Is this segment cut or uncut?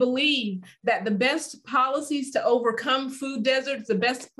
uncut